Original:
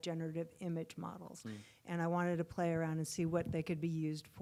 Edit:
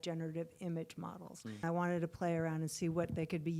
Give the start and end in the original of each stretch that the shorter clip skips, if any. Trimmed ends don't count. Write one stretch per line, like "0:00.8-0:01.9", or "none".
0:01.6-0:02.0